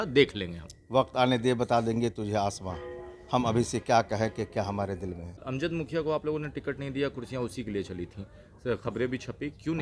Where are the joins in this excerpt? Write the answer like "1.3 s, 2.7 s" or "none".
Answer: 5.4 s